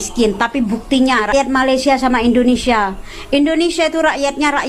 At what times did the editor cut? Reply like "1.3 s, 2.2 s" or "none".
1.3 s